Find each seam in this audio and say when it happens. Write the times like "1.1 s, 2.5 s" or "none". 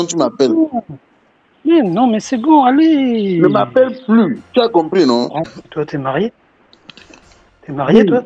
5.5 s